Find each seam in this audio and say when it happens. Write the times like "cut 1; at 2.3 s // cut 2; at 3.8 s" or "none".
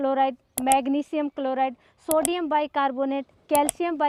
none